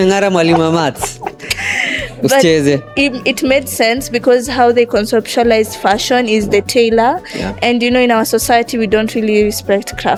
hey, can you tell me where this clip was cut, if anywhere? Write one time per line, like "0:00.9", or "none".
none

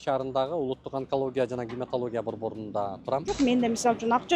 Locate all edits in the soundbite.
0:03.4

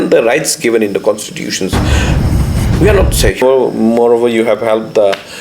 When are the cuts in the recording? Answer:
0:03.4

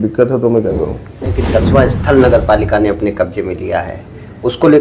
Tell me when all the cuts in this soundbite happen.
0:01.4

